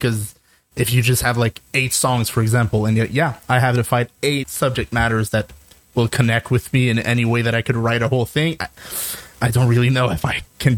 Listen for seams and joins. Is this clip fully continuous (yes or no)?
no